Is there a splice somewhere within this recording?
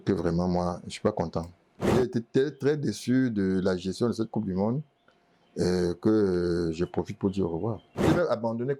yes; 2 cuts; at 1.9 s, 8.1 s

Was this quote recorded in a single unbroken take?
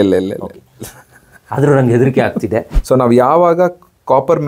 no; 1 cut; at 2.7 s

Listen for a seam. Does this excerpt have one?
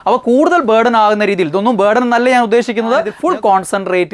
yes; 1 cut; at 3.1 s

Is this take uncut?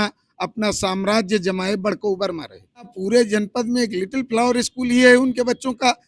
no; 1 cut; at 3.0 s

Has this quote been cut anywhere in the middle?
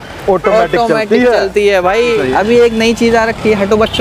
yes; 1 cut; at 2.2 s

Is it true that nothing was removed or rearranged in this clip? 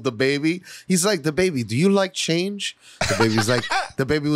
yes; 0 cuts

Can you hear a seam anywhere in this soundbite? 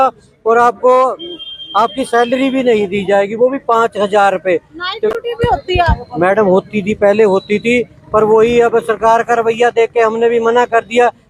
no; 0 cuts

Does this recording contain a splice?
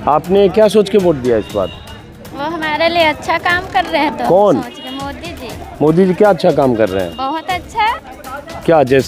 no; 0 cuts

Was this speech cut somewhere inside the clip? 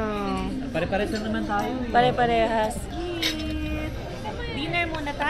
yes; 1 cut; at 2.9 s

